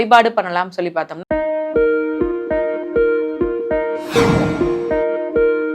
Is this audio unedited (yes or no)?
no